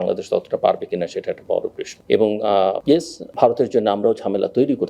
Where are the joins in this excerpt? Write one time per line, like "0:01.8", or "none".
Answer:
0:01.9